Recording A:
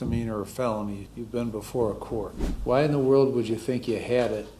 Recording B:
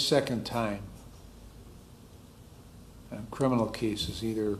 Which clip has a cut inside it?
A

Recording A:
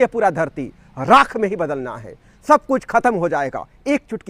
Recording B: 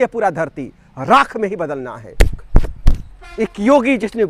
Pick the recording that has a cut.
B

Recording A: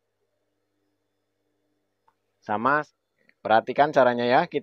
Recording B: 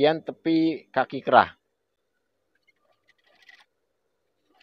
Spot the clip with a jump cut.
A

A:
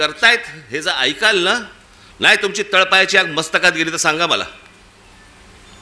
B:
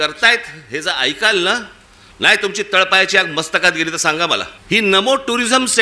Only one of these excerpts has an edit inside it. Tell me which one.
B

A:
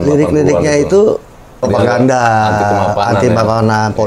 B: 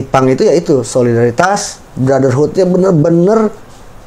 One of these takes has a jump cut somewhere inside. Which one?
A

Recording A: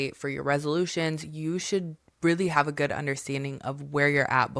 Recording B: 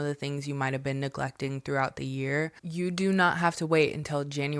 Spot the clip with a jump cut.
B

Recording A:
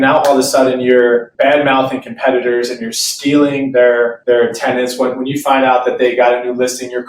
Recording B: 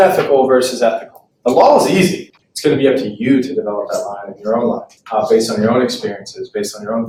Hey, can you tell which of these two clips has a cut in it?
A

